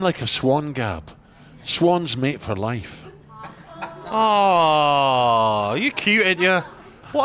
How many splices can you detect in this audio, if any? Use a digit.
0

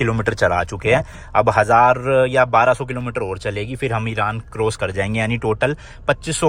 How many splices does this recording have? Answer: 0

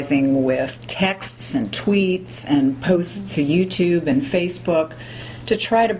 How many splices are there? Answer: 1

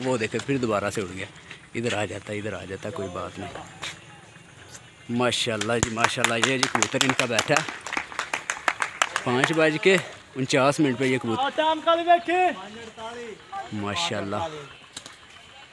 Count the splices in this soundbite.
1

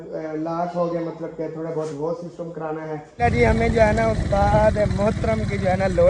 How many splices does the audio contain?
1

